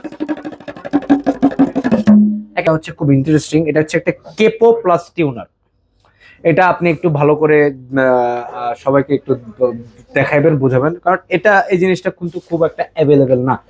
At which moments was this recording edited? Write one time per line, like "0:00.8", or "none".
0:02.5